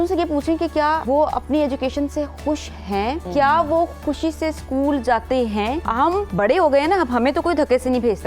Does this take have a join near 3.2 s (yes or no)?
yes